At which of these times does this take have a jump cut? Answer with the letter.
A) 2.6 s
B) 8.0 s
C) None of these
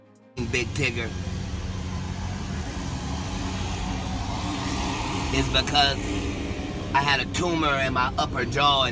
C